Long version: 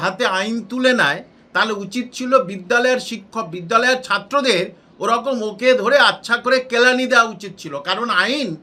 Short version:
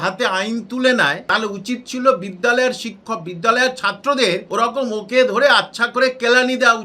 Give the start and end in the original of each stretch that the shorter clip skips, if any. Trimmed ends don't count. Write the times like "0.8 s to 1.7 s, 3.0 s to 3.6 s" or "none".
1.2 s to 1.5 s, 4.7 s to 4.9 s